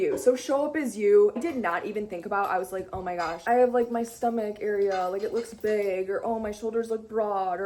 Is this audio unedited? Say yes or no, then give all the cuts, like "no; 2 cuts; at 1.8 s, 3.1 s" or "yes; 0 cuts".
yes; 0 cuts